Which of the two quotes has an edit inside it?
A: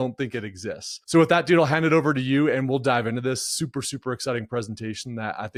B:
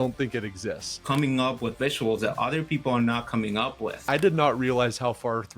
B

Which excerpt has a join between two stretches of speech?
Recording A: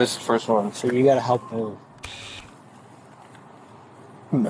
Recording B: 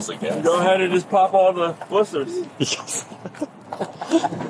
B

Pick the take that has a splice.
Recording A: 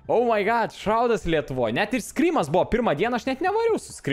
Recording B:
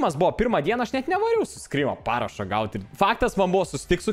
B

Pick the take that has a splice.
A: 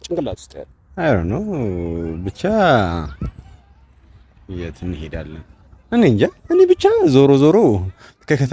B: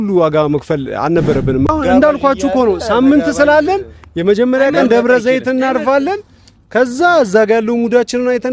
B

